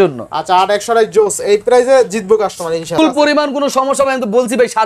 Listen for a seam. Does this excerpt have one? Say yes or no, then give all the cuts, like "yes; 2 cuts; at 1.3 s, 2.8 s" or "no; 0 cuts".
yes; 1 cut; at 3.0 s